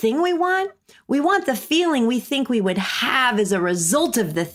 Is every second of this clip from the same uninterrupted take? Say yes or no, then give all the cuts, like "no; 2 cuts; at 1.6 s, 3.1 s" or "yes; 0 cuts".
yes; 0 cuts